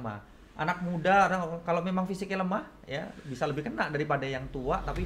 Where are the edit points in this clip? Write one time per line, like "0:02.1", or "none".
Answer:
none